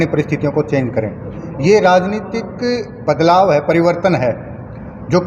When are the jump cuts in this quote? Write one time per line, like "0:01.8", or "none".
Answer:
none